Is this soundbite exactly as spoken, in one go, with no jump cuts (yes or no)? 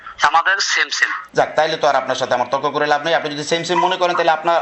yes